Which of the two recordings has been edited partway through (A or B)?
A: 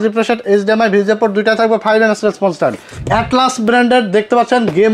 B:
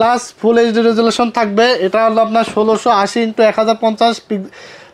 A